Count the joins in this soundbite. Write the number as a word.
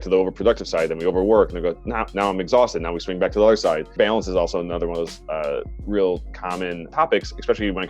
one